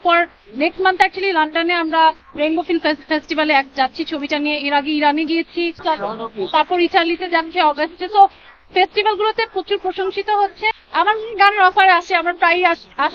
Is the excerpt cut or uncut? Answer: cut